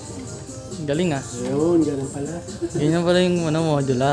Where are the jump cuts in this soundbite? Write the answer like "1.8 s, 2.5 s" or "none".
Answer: none